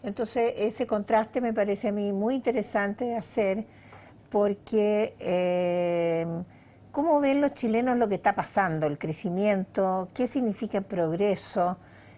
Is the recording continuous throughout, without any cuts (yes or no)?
no